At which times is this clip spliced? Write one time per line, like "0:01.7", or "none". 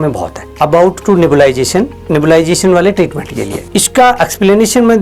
none